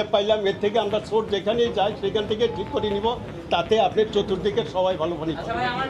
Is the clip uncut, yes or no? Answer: yes